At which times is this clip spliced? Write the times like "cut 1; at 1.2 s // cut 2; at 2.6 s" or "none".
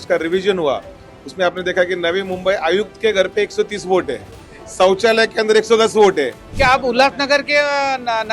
cut 1; at 6.4 s